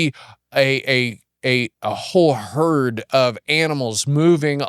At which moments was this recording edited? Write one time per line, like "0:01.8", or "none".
none